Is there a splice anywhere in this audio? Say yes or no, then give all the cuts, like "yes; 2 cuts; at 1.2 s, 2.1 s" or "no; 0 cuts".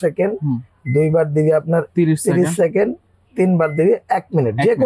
no; 0 cuts